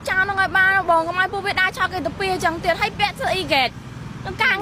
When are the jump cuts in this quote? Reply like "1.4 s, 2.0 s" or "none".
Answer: none